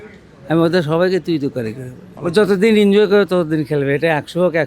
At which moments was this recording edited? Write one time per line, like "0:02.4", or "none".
0:02.1